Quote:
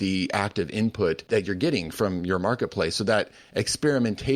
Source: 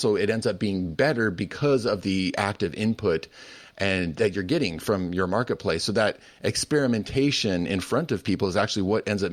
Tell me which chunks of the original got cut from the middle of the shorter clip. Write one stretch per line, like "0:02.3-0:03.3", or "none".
0:03.3-0:04.1